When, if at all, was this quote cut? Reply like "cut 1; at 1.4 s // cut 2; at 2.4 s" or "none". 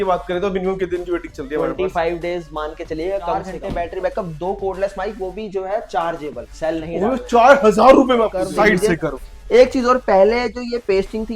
cut 1; at 3.6 s // cut 2; at 8.4 s